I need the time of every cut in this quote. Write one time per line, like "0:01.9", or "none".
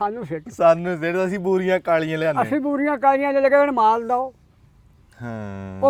none